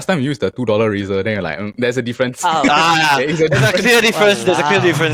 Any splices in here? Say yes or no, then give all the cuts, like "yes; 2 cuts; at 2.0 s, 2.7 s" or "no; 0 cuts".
no; 0 cuts